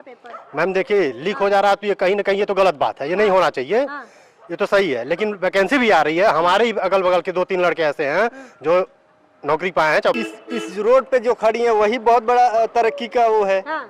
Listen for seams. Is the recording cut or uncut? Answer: cut